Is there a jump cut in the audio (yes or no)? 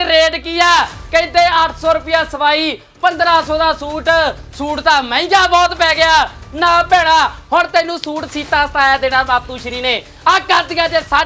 no